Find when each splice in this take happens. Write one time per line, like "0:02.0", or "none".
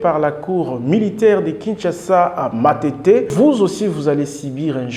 0:03.3